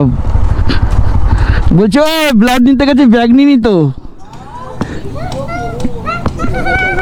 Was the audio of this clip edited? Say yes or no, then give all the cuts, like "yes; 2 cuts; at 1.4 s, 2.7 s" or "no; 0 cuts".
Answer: no; 0 cuts